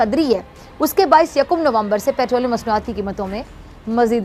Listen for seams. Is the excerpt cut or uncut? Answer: uncut